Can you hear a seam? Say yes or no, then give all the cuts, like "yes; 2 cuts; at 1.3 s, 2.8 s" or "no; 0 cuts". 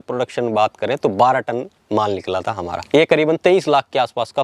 yes; 1 cut; at 2.8 s